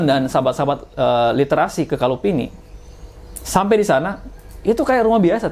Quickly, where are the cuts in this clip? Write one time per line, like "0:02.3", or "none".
none